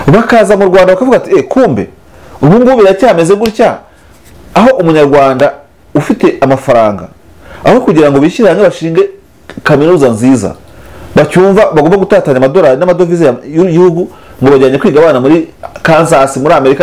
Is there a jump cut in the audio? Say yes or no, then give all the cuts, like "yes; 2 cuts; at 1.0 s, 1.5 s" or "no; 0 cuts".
no; 0 cuts